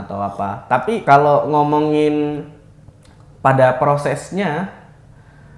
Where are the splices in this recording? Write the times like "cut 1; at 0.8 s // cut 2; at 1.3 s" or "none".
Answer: cut 1; at 1.0 s